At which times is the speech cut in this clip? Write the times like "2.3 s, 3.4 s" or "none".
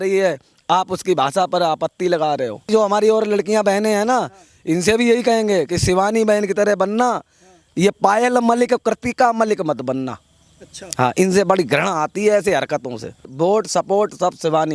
2.7 s, 13.3 s